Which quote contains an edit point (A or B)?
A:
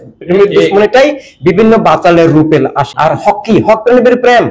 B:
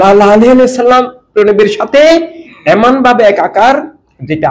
A